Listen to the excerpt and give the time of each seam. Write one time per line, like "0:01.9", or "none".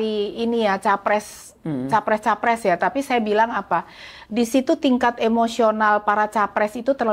none